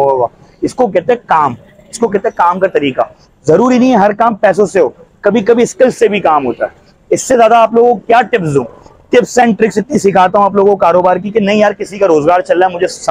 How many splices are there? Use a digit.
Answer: 0